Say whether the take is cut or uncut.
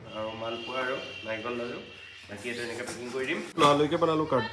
cut